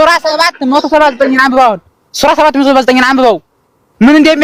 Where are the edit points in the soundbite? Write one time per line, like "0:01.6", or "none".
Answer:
none